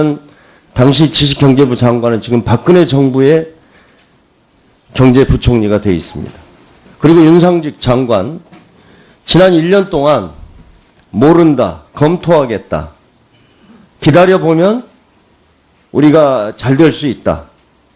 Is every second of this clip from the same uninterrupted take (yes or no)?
no